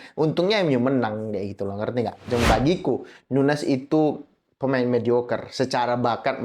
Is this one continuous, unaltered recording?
no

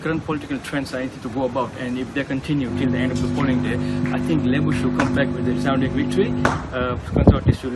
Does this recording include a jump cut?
no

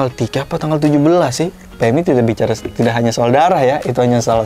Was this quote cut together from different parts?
yes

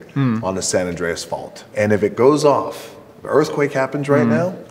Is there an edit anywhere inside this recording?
yes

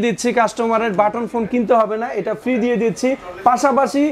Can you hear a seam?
no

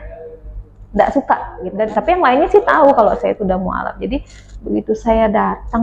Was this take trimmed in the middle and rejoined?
yes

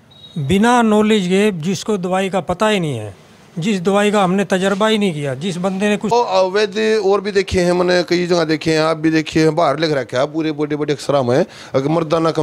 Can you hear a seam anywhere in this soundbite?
yes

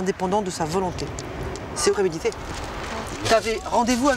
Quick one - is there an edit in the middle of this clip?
yes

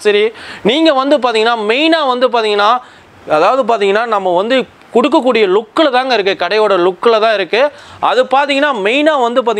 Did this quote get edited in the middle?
no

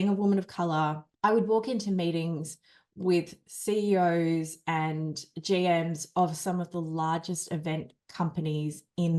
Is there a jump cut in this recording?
yes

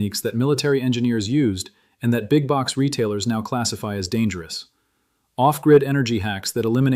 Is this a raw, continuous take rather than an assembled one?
yes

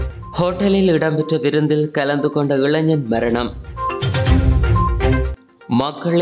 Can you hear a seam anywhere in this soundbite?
no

